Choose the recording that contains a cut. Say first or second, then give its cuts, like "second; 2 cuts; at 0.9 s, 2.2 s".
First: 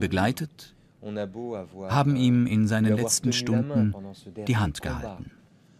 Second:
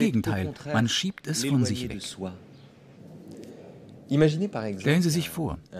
second; 1 cut; at 3.9 s